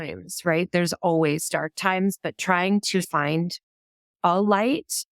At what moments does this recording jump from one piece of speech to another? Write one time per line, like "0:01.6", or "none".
0:01.7
0:03.1